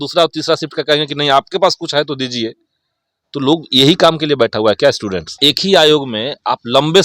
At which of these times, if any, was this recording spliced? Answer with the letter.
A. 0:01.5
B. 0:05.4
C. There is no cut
B